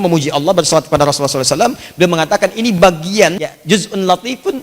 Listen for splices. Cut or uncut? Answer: cut